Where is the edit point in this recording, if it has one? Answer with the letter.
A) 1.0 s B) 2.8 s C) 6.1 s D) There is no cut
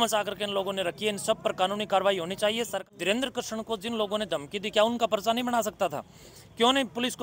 B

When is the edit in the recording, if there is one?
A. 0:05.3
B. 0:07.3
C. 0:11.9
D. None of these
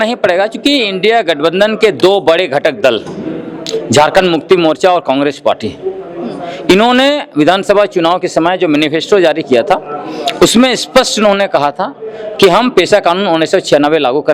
D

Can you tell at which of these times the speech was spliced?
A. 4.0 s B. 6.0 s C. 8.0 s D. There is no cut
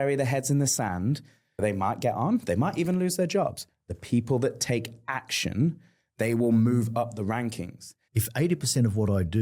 C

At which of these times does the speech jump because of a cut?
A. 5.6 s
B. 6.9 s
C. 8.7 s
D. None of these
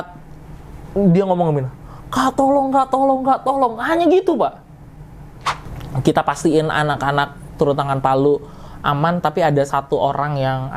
A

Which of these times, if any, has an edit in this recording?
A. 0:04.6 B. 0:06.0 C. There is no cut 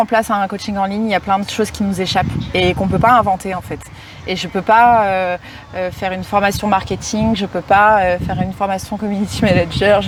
C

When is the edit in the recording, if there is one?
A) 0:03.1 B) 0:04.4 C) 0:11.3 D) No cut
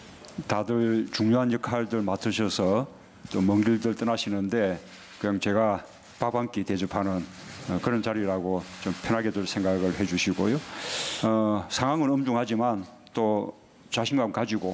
D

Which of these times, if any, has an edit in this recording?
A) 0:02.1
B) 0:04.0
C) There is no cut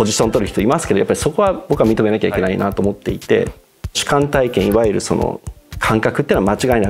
B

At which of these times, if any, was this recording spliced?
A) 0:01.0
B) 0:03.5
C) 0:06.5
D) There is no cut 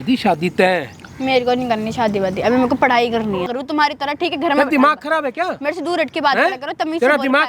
B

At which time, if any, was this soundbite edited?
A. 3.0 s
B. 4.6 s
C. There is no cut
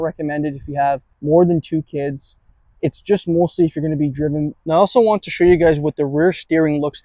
B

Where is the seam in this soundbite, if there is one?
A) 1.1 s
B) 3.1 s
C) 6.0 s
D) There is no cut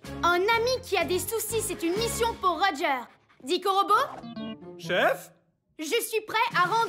D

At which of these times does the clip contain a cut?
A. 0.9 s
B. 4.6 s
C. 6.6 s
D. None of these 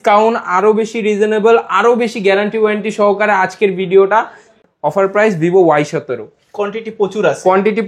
B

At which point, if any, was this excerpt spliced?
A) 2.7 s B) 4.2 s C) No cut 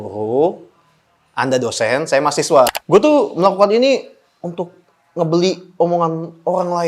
A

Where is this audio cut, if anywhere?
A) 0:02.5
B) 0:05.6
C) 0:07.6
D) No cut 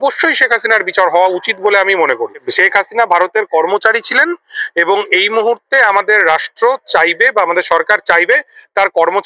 A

